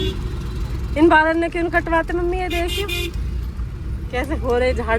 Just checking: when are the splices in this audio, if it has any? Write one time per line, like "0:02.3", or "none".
none